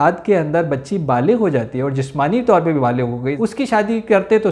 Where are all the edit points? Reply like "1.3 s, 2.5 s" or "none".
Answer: 3.3 s